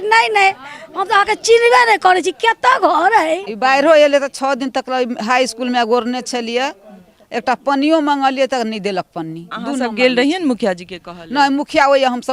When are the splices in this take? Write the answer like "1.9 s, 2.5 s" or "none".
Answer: 3.5 s, 9.5 s

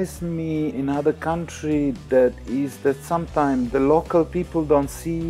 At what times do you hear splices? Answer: 0.8 s, 3.7 s

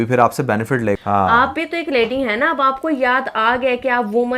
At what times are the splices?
1.0 s

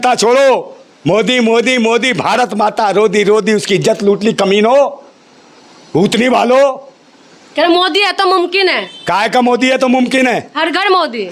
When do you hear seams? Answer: none

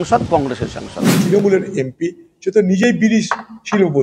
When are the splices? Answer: 1.2 s

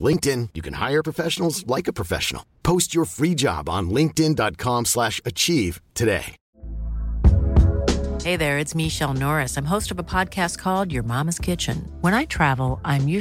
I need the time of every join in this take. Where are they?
6.4 s

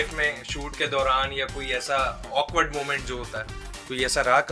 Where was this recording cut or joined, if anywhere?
none

